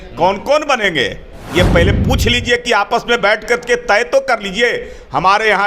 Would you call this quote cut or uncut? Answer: uncut